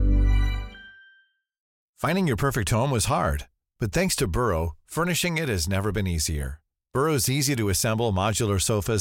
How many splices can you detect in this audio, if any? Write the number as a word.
one